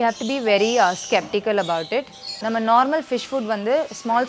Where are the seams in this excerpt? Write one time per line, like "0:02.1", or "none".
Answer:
0:02.3